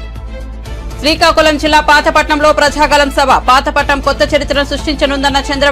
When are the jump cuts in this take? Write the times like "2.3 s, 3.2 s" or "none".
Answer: none